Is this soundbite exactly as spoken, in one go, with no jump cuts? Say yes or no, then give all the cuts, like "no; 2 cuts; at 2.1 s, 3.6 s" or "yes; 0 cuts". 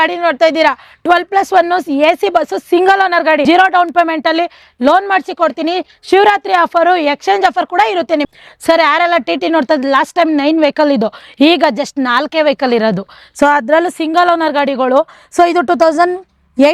no; 2 cuts; at 3.4 s, 8.2 s